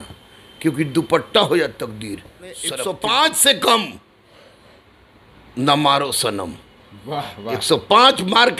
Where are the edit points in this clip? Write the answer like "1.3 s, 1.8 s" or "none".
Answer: 2.7 s

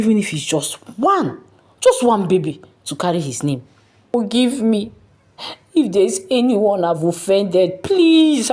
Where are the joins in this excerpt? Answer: 4.1 s

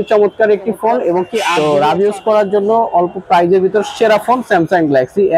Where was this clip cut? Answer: 1.4 s

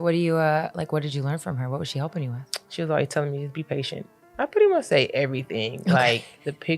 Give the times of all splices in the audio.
4.2 s

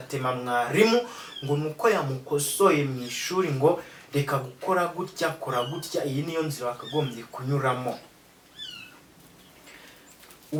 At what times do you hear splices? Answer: none

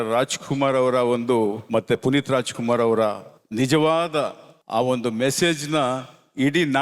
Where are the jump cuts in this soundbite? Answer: none

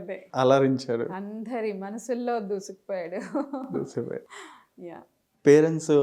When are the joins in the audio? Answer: none

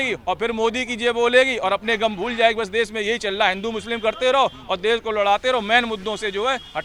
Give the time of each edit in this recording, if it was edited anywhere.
none

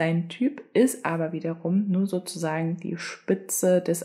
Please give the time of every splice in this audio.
none

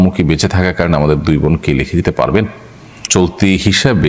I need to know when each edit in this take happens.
3.0 s

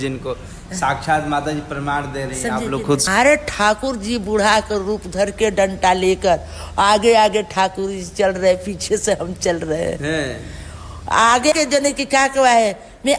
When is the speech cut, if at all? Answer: 3.1 s, 11.5 s

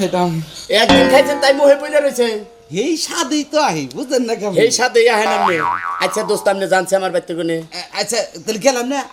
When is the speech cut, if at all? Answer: none

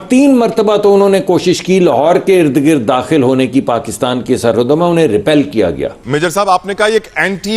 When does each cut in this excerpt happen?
6.0 s

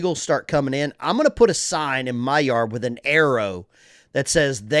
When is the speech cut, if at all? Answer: none

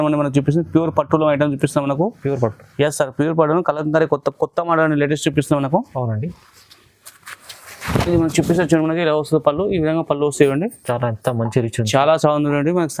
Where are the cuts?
none

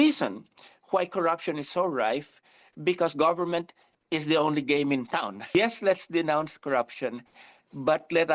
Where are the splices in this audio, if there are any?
none

